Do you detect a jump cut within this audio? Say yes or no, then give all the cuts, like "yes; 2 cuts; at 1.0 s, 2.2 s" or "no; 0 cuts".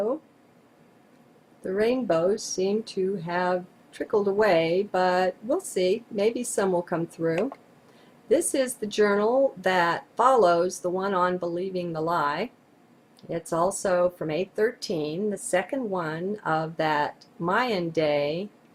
no; 0 cuts